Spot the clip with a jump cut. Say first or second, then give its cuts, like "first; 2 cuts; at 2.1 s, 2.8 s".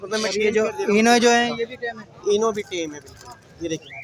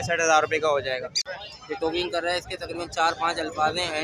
second; 1 cut; at 1.1 s